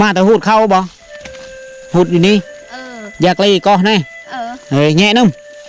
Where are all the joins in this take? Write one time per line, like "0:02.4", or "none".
none